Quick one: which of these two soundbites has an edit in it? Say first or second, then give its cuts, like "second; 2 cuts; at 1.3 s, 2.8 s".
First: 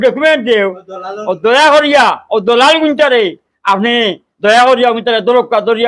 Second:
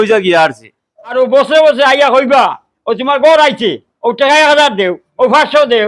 second; 1 cut; at 1.1 s